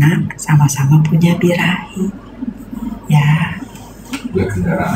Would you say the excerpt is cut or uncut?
uncut